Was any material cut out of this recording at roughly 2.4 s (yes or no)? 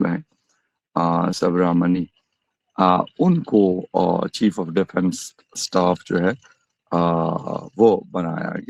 no